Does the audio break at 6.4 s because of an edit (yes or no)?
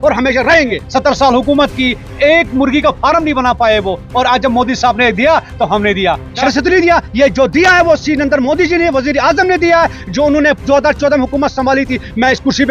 yes